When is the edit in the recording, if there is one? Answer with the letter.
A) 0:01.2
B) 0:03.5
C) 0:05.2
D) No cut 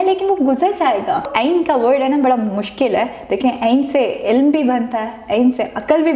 A